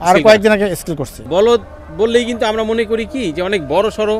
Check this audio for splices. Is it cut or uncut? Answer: cut